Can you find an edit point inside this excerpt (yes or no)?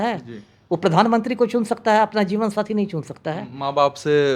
no